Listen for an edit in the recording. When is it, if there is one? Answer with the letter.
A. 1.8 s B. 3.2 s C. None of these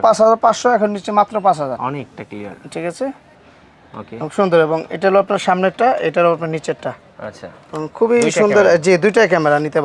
A